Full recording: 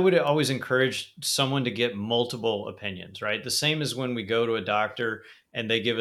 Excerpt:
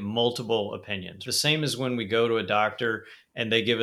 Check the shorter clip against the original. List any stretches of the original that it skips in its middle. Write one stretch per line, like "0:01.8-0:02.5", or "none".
0:03.2-0:03.4